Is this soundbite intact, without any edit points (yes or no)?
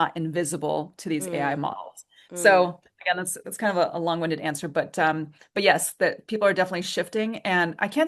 yes